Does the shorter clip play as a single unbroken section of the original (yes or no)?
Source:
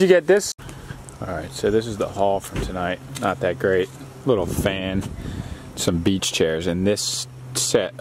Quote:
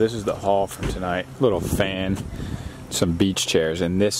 no